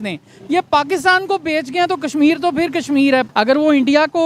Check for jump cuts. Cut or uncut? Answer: cut